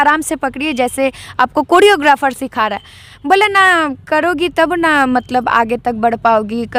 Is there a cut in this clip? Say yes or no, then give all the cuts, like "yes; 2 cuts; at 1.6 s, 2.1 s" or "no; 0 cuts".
no; 0 cuts